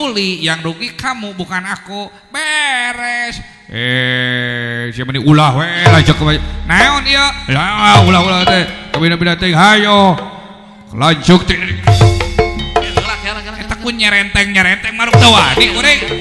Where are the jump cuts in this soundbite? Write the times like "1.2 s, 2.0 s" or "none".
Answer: none